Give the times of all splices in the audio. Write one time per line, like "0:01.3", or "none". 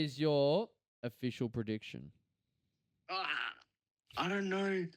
none